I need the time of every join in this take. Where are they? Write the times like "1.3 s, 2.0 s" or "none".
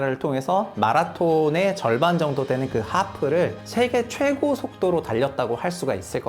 3.6 s